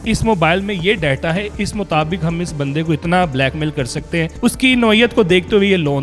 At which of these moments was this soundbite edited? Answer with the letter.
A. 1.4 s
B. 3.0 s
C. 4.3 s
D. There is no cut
C